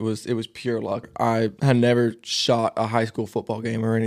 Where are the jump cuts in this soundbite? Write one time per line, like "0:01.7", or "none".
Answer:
0:01.1